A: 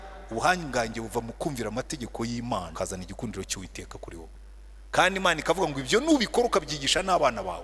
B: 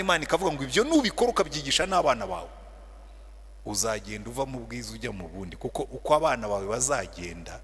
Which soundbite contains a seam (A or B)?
A